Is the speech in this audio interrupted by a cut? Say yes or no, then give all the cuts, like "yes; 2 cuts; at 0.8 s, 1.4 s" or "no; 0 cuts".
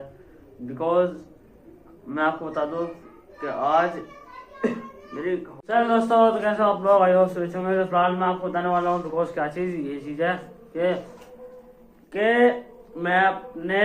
yes; 1 cut; at 5.6 s